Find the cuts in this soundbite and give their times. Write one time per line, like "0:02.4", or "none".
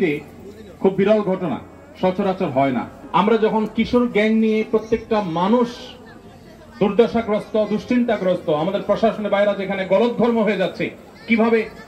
0:02.9